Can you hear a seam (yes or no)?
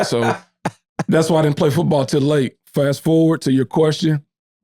yes